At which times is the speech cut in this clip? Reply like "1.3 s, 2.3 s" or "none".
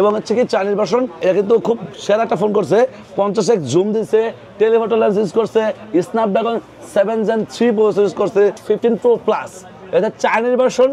1.2 s, 8.6 s